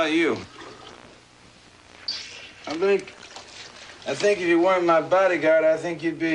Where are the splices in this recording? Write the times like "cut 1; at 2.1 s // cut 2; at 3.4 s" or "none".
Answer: cut 1; at 4.7 s